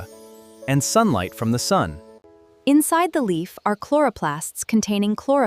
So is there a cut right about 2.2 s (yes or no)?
yes